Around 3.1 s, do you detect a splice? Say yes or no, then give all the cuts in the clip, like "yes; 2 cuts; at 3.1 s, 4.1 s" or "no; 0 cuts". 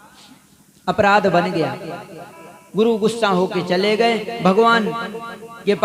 no; 0 cuts